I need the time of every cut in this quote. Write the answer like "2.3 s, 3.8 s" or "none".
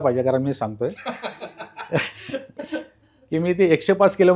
none